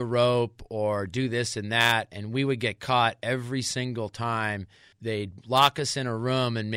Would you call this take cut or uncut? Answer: cut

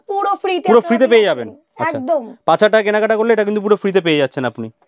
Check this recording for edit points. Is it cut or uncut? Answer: uncut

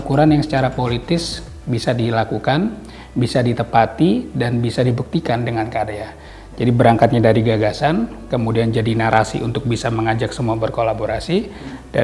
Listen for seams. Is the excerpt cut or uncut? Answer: uncut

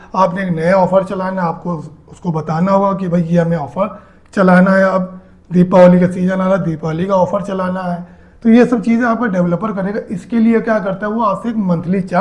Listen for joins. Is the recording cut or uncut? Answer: uncut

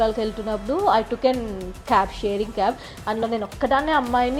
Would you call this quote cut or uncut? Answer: uncut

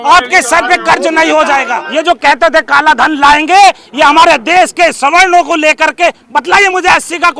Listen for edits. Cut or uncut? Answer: cut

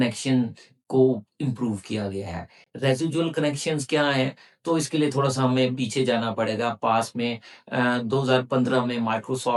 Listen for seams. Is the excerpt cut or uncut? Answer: uncut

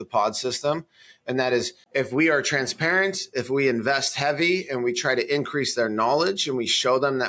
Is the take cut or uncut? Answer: cut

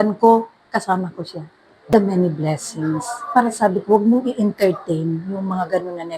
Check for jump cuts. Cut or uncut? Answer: cut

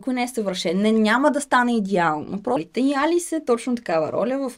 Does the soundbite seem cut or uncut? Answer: cut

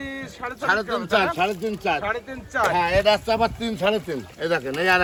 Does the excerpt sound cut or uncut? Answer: uncut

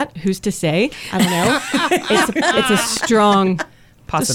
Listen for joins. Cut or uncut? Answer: uncut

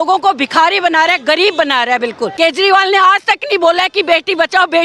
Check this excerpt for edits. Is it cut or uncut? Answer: cut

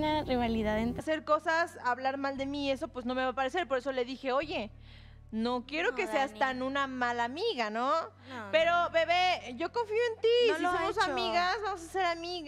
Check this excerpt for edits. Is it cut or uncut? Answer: uncut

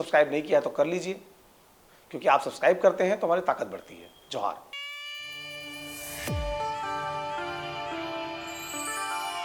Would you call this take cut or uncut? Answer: cut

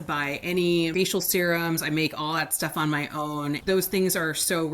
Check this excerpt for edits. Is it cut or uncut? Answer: cut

